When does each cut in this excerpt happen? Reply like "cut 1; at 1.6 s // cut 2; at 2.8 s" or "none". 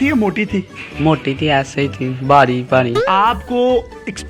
cut 1; at 3.0 s